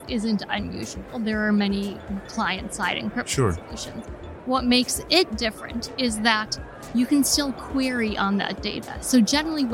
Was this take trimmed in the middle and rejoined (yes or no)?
no